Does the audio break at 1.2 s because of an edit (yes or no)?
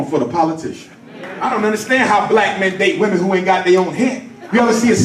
yes